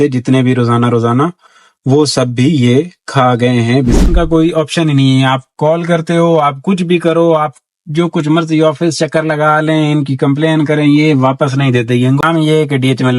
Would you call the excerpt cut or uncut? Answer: cut